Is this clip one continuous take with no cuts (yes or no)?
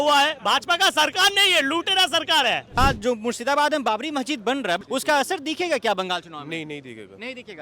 no